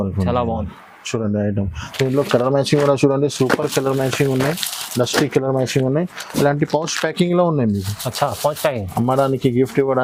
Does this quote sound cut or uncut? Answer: uncut